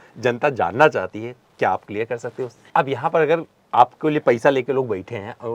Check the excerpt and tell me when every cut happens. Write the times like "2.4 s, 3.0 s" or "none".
2.5 s